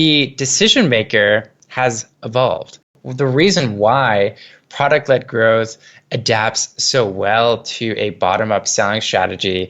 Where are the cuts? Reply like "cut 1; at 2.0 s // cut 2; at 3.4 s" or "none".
cut 1; at 3.0 s

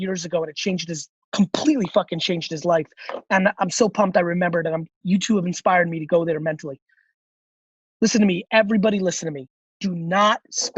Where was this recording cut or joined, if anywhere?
cut 1; at 9.6 s

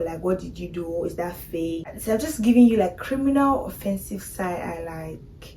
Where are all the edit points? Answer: none

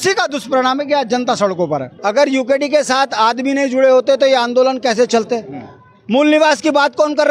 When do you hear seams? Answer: cut 1; at 1.9 s

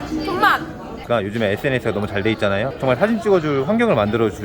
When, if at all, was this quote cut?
cut 1; at 1.0 s

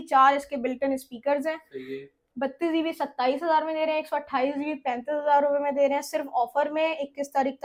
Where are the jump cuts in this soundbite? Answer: none

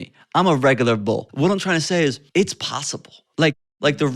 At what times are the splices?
cut 1; at 1.2 s // cut 2; at 2.2 s

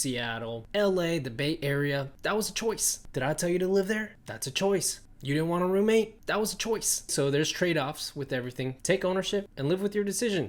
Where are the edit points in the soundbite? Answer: none

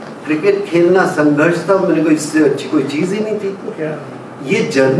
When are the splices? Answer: none

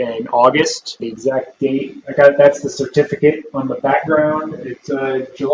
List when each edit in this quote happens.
cut 1; at 1.0 s

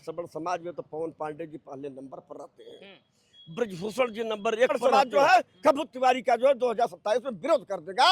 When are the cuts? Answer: cut 1; at 4.8 s

